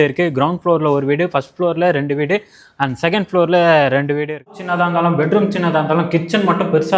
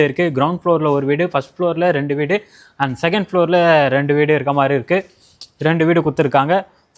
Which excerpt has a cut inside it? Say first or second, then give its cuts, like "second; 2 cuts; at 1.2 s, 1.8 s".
first; 1 cut; at 4.5 s